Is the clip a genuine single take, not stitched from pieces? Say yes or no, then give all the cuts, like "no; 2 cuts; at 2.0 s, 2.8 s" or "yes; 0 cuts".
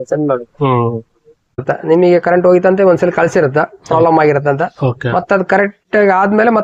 no; 1 cut; at 1.6 s